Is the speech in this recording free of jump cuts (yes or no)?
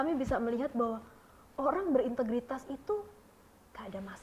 yes